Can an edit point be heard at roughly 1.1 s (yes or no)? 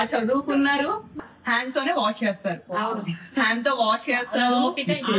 yes